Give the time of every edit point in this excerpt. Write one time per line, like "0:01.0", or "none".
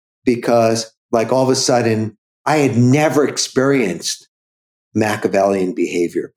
0:00.9